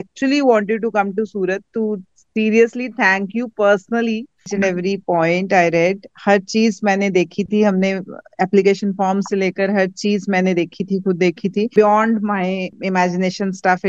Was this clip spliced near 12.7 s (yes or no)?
yes